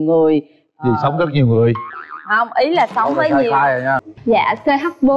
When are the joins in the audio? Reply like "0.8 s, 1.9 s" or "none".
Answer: 4.1 s